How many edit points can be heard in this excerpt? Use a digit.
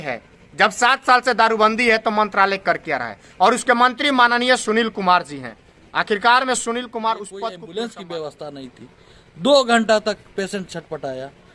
1